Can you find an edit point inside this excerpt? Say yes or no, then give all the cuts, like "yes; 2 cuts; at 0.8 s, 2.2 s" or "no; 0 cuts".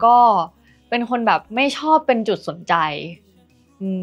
no; 0 cuts